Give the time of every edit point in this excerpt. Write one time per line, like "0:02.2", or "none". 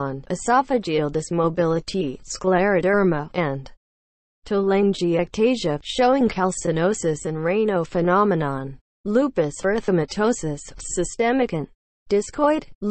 0:04.9